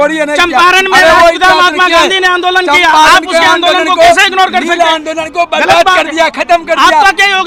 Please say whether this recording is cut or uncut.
uncut